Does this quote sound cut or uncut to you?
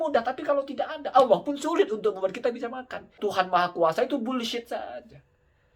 cut